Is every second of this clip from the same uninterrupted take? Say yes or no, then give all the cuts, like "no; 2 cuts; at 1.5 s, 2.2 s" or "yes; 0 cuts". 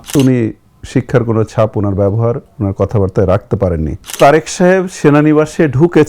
no; 1 cut; at 4.2 s